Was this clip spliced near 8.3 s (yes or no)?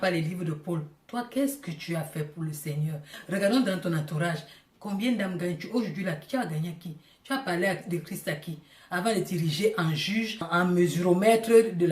no